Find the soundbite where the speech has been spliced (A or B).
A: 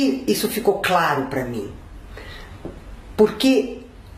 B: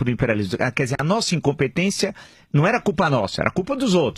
B